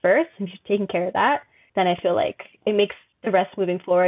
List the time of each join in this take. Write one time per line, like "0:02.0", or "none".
0:01.6
0:03.1